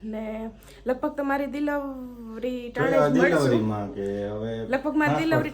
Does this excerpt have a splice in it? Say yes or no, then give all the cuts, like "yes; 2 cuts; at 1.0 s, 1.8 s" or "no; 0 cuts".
no; 0 cuts